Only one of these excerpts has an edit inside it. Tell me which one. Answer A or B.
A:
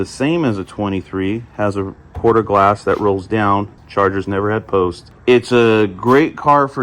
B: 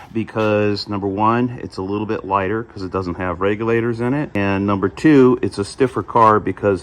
A